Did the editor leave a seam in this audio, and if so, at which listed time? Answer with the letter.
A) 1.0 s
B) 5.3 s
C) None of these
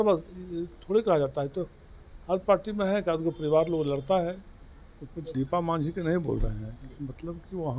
B